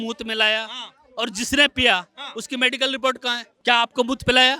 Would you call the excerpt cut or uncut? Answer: cut